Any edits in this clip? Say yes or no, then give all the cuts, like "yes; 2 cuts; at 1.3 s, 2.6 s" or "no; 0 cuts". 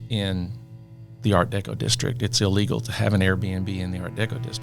no; 0 cuts